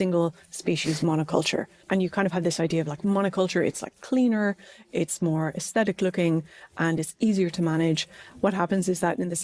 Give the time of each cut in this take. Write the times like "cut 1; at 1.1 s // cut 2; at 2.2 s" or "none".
cut 1; at 1.8 s // cut 2; at 8.2 s